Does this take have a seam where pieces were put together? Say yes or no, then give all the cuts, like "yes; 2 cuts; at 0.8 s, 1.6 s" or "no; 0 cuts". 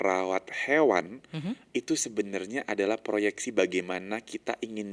no; 0 cuts